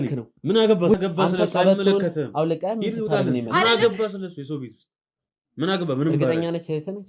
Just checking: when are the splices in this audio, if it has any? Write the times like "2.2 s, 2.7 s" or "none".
1.0 s